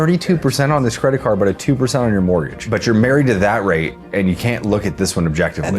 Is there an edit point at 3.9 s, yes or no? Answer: no